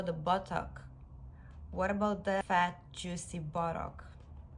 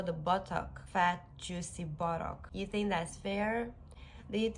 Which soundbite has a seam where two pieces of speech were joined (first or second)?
second